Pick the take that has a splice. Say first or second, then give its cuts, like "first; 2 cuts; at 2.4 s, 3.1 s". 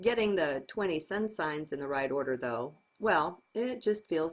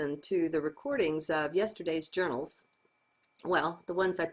first; 1 cut; at 3.4 s